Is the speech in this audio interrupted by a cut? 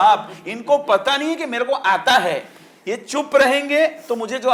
no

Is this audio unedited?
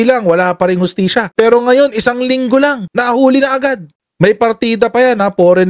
yes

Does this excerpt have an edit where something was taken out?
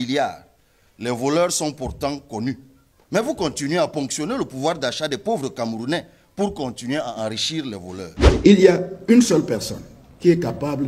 yes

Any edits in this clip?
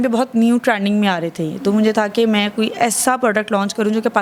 no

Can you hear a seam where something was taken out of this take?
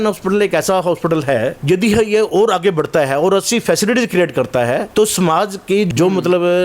yes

